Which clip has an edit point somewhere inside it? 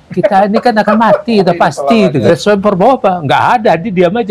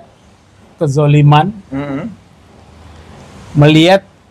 first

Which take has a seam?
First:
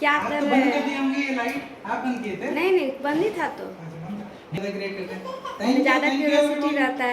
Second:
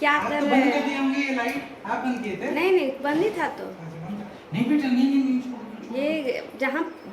first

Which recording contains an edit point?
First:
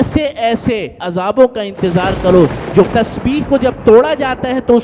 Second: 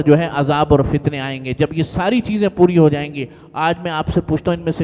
first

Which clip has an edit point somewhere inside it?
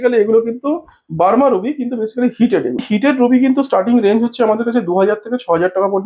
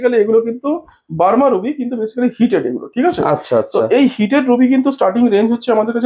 first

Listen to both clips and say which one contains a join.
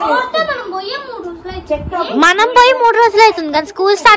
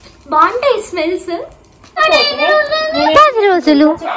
second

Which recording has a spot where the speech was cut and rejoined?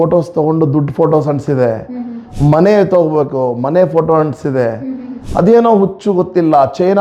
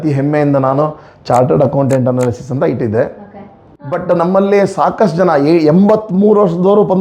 second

